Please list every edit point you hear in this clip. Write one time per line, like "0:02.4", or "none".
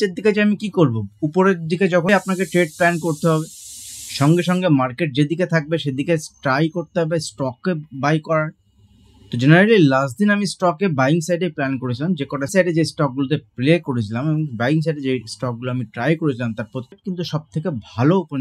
0:02.1
0:12.5
0:17.0